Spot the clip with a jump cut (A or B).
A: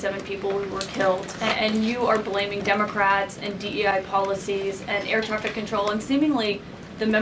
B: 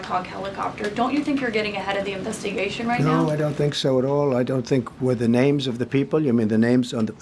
A